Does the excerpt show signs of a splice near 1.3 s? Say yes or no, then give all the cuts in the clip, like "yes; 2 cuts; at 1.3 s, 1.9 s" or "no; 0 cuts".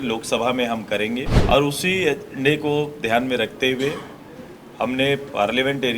yes; 1 cut; at 1.3 s